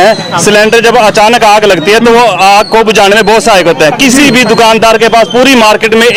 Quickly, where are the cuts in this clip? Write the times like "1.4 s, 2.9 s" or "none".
none